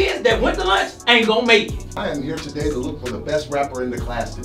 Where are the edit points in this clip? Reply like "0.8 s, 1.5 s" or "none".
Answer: 1.9 s

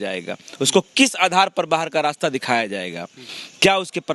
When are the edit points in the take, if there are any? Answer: none

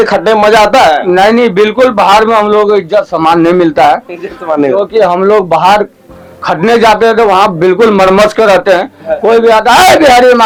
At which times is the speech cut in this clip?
none

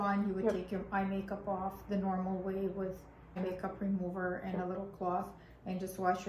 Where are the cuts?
3.4 s

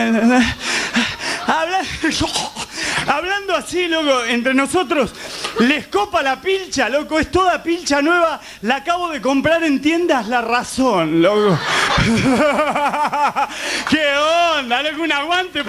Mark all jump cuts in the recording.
none

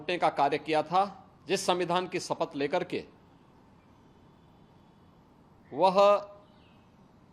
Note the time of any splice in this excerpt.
1.3 s

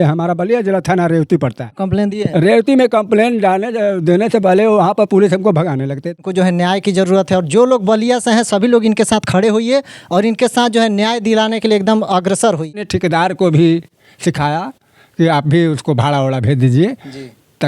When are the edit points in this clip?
1.8 s, 6.2 s, 12.9 s

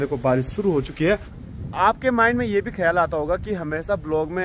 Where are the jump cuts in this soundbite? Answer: 1.3 s

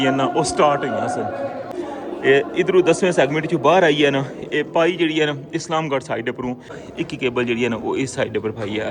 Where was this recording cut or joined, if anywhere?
1.7 s, 6.8 s

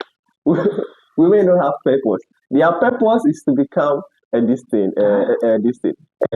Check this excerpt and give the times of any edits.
none

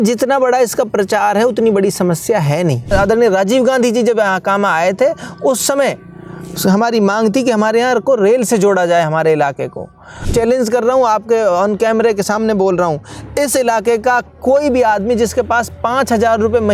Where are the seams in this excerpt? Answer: 2.9 s, 10.2 s

